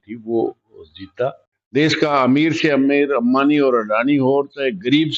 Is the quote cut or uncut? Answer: cut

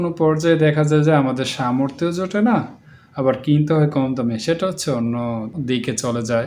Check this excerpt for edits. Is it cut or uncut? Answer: cut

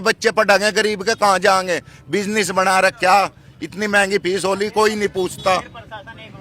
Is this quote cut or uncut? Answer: uncut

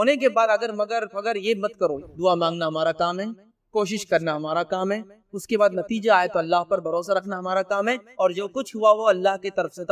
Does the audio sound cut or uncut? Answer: cut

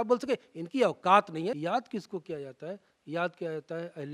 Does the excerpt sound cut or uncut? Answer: cut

